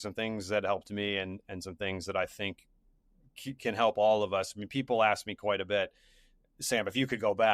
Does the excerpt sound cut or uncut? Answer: uncut